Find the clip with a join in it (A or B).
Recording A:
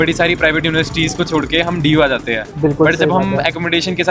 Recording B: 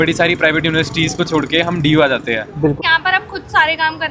B